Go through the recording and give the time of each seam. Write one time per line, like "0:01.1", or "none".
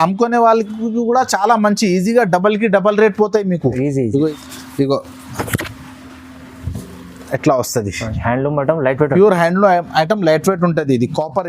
0:04.3